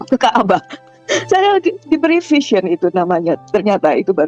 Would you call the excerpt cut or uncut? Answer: cut